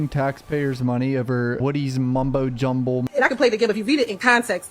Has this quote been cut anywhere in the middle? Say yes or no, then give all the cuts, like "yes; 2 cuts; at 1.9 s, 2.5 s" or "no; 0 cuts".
yes; 2 cuts; at 1.6 s, 3.1 s